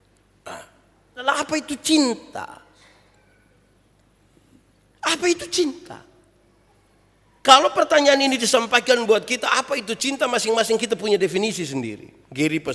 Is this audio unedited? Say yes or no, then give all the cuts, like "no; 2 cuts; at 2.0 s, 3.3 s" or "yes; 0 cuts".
no; 1 cut; at 1.2 s